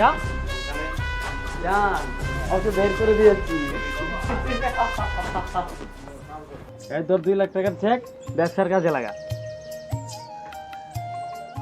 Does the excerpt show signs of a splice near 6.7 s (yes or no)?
yes